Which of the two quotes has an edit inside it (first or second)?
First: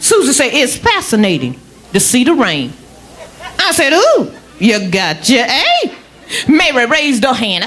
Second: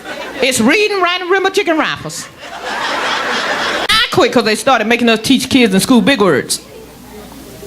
second